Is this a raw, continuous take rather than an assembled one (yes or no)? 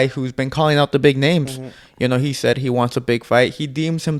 yes